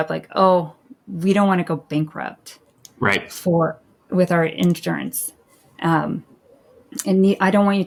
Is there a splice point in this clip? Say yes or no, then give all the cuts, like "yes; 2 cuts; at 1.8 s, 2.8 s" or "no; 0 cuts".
no; 0 cuts